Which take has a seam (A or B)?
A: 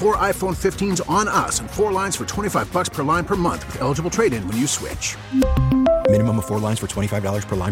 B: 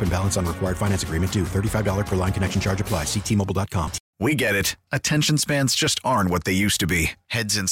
B